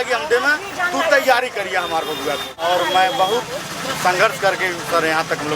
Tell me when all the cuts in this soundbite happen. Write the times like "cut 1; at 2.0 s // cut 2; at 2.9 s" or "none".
cut 1; at 2.6 s